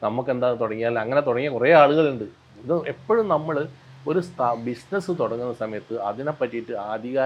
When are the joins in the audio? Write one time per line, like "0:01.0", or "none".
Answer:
none